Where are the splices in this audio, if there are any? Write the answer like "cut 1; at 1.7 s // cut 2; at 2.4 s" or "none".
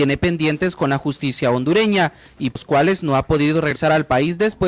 cut 1; at 2.8 s